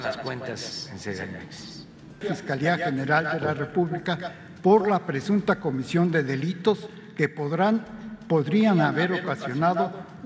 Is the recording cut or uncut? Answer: cut